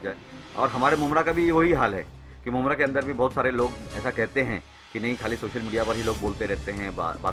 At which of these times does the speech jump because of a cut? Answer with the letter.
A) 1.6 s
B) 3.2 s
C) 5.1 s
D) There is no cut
D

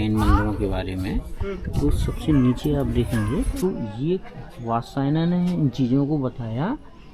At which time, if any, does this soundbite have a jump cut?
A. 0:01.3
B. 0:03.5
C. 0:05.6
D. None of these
B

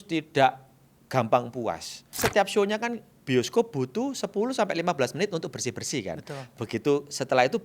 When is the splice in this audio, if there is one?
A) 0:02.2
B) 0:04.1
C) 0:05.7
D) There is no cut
A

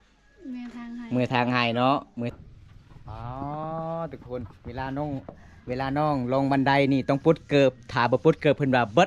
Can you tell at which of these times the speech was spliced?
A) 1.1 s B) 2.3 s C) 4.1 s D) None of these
B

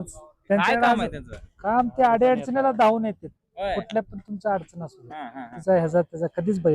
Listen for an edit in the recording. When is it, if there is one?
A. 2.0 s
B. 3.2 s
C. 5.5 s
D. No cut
C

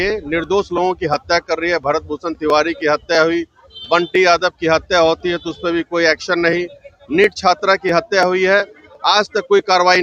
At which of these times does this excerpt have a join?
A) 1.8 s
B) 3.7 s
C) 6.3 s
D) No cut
D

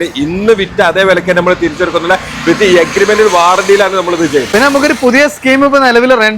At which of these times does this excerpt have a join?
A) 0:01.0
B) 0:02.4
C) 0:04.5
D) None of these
D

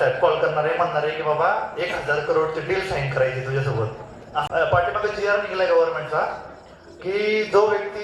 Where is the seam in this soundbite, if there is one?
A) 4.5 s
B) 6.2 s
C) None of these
A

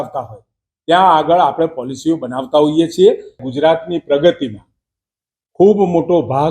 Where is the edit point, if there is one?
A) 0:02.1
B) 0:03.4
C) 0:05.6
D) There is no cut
B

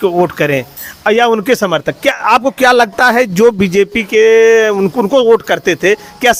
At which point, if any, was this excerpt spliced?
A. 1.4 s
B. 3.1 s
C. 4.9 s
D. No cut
D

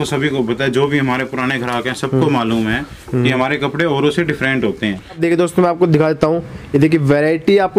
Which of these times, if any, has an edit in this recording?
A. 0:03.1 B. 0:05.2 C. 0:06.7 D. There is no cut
B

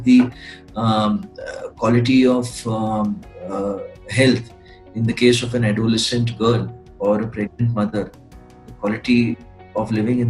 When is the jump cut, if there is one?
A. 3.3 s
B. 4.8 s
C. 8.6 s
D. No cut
D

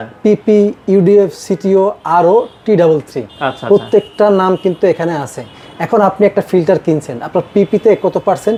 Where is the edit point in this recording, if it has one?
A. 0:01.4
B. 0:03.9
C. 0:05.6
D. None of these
D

